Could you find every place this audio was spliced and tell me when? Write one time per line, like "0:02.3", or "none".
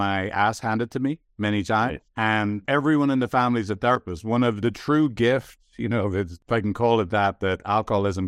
0:04.6
0:06.4